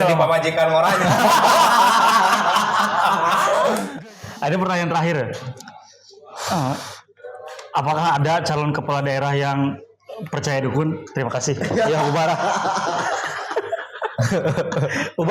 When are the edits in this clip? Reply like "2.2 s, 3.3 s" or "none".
3.9 s